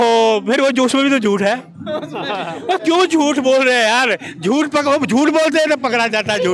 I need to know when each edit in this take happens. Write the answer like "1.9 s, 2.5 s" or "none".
none

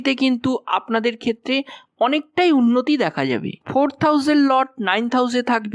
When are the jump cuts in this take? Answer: 3.5 s

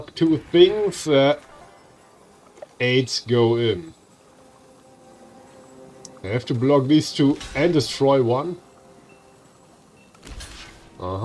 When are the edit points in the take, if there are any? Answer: none

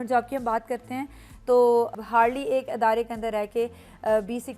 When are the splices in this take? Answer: 1.9 s

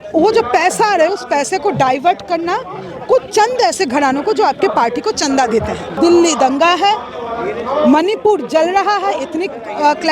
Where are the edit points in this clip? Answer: 5.9 s

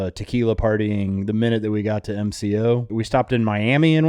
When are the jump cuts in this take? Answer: 3.0 s

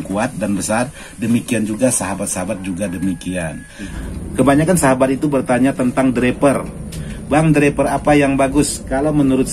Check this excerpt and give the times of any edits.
3.9 s

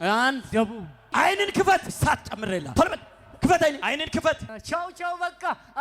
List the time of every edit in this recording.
0.8 s, 2.3 s, 3.8 s, 4.5 s

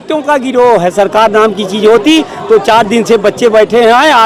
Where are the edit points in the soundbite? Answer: none

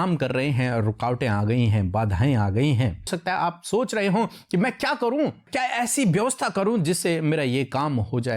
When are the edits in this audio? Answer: 3.1 s

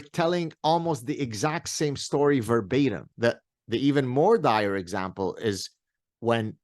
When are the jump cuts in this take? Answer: 3.1 s

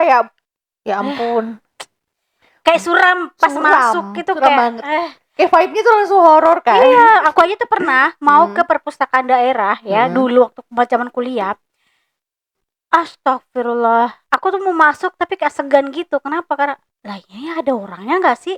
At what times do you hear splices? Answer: none

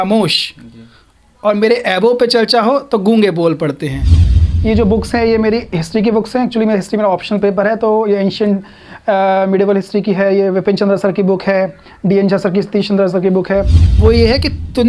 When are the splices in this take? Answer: 4.4 s, 13.8 s

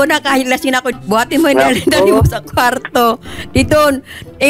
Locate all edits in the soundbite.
1.0 s

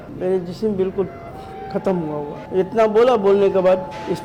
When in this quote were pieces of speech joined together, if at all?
none

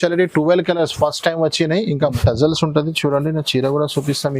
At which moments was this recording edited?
2.2 s

